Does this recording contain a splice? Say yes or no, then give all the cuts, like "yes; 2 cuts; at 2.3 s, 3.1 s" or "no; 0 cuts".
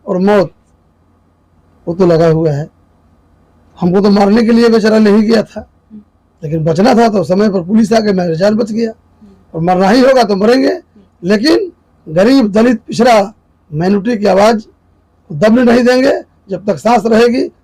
no; 0 cuts